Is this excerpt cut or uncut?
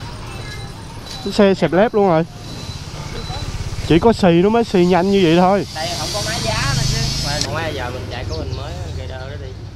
cut